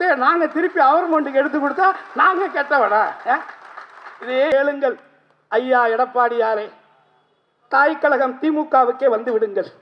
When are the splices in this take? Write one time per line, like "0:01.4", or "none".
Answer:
0:04.5